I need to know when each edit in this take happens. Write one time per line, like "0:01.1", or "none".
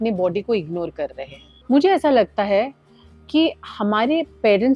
none